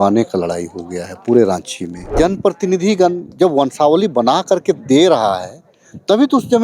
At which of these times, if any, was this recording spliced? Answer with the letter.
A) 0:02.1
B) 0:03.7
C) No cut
A